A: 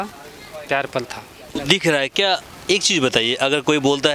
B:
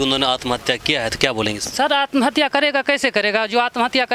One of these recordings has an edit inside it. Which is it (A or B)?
A